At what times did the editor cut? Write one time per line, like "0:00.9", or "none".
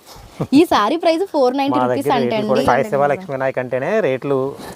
0:02.6

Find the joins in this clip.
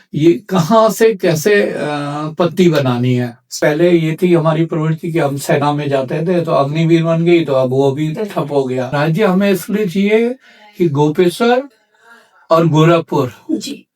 0:03.5
0:08.9

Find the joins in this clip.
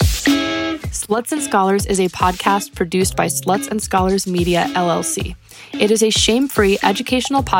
0:00.9

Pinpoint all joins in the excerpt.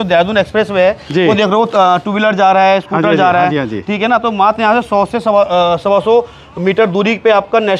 none

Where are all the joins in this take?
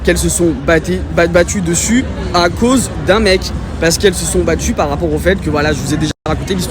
none

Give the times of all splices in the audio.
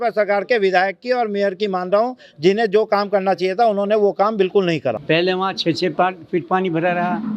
0:05.0

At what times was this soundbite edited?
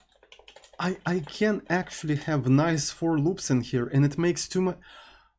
none

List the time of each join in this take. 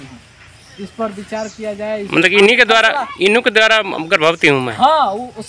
0:02.1

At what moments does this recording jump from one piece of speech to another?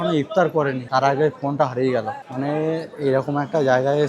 0:02.2

